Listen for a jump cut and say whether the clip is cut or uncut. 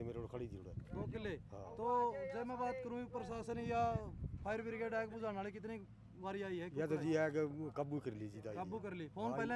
uncut